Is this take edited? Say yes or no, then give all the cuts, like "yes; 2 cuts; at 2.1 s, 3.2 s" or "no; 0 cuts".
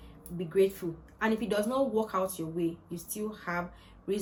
no; 0 cuts